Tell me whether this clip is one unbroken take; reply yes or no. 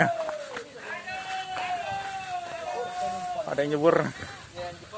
yes